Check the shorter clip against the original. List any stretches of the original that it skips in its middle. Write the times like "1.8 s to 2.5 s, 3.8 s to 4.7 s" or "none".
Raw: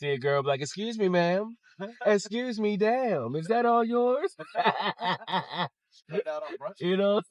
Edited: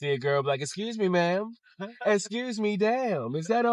none